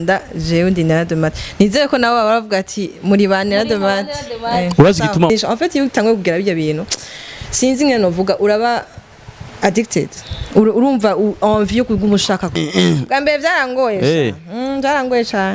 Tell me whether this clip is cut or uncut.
cut